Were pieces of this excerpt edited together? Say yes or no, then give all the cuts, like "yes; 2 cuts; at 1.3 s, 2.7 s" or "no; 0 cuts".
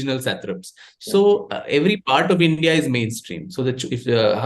no; 0 cuts